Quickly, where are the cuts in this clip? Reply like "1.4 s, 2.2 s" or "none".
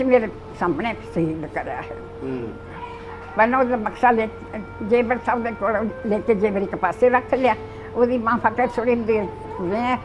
none

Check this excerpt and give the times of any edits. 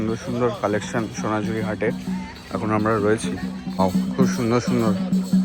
none

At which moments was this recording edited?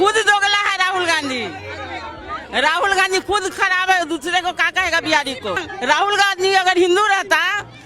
5.7 s

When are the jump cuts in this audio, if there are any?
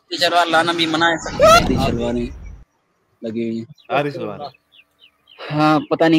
1.7 s

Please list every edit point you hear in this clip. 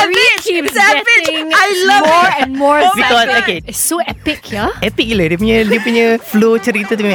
3.6 s, 6.2 s

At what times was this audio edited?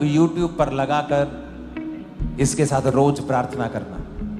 none

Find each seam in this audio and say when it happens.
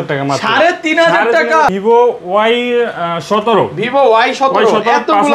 1.7 s

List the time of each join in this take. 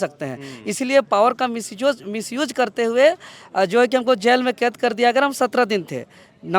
none

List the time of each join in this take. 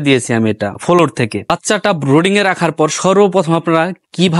1.5 s

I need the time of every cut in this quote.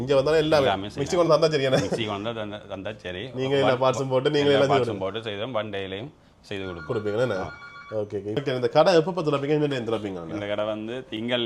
none

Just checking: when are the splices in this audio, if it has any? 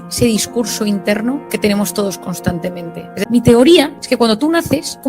3.2 s

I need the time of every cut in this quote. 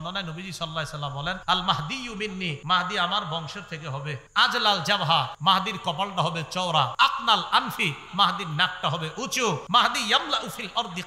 1.4 s, 2.6 s, 4.2 s, 5.3 s, 6.9 s, 9.6 s

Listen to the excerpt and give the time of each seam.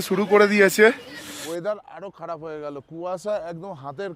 1.3 s

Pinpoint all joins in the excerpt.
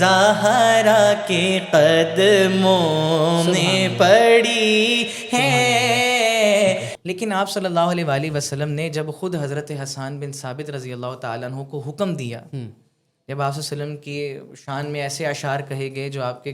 6.9 s

